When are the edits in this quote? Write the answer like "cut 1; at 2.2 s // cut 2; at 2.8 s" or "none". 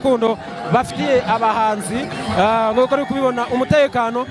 none